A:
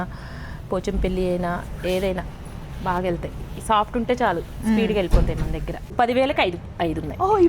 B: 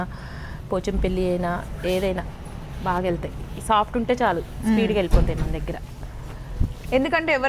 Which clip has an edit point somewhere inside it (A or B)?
A